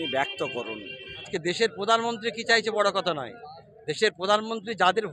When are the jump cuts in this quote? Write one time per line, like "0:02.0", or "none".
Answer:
0:01.3